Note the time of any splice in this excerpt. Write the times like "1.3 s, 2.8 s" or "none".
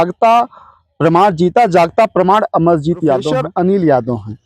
3.4 s